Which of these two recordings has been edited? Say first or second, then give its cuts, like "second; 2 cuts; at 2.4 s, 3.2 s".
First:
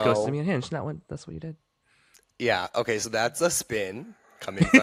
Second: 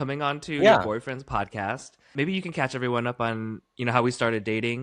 second; 1 cut; at 2.1 s